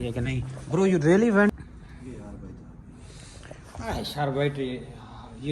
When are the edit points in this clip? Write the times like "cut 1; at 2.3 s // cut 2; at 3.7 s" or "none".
cut 1; at 1.6 s